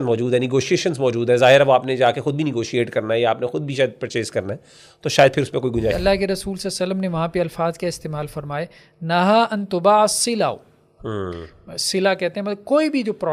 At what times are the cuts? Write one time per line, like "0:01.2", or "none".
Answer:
0:05.9